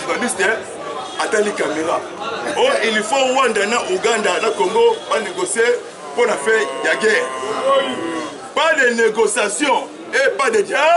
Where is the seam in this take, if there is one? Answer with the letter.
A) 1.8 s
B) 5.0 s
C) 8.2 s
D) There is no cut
D